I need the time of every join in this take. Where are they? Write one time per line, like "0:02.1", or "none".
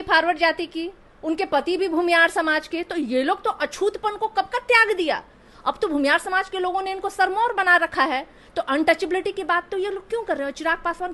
none